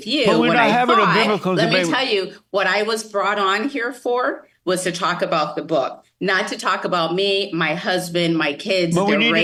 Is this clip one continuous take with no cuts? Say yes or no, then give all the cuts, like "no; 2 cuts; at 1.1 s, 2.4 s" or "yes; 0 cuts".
yes; 0 cuts